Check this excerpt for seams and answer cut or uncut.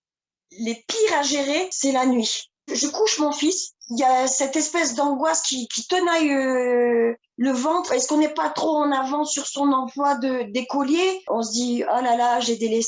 cut